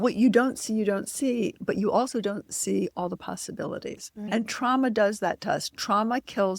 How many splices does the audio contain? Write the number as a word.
one